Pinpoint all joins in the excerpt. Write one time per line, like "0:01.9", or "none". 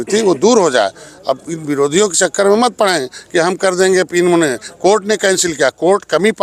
none